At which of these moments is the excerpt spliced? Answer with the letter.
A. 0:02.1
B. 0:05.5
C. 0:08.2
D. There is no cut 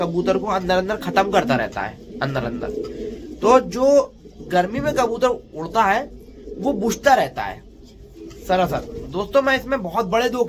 D